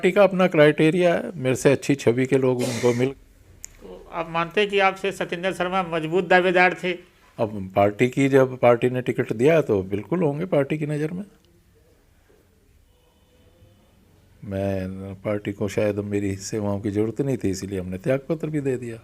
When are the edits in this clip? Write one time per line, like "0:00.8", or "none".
0:02.9

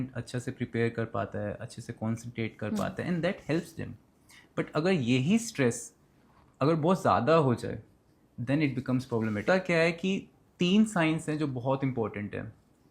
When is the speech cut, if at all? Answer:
0:09.4

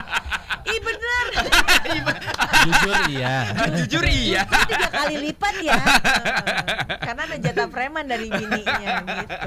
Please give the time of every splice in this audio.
none

